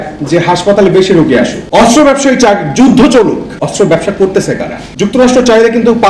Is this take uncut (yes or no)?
no